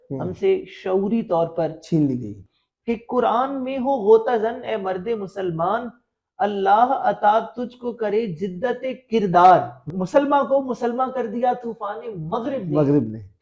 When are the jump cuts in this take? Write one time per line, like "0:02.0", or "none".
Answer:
0:02.5
0:09.9

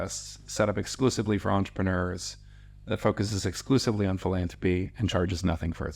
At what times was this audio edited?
none

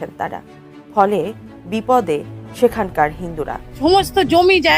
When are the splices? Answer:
0:03.6

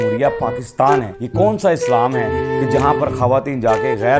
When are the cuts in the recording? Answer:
0:01.2

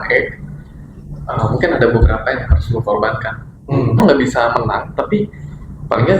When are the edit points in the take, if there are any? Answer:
0:04.0

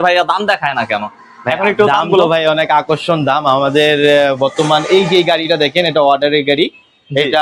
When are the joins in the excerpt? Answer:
none

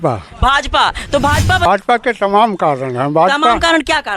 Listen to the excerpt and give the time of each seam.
0:01.7

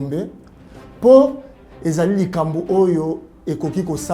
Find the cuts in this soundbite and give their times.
0:01.6

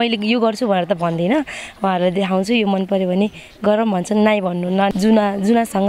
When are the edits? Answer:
0:04.9

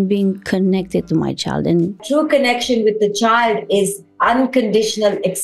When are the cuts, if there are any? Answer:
0:02.0

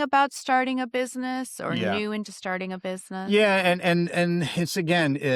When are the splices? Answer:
none

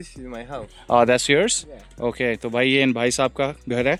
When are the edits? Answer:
none

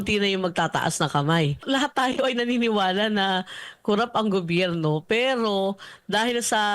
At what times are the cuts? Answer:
0:01.6

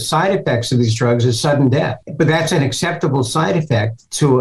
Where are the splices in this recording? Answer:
none

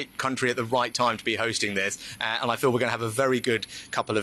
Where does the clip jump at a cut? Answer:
none

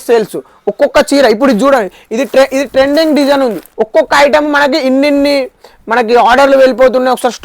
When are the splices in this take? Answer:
0:03.7

